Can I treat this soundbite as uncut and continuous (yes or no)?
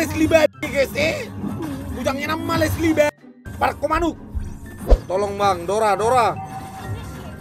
no